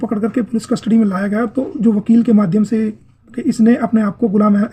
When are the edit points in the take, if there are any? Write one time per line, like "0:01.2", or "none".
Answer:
0:03.4